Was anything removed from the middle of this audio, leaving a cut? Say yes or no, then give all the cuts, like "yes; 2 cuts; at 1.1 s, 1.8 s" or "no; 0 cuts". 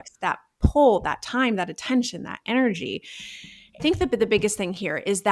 yes; 1 cut; at 3.8 s